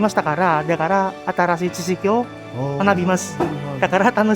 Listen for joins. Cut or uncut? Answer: uncut